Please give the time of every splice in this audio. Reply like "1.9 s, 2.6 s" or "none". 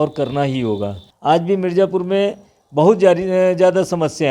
1.1 s